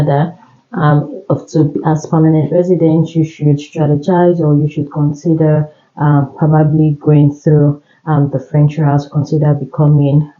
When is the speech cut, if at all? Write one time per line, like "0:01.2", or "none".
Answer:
none